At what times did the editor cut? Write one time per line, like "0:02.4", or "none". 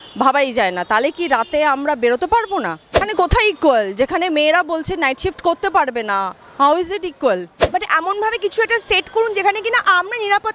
0:03.1
0:07.6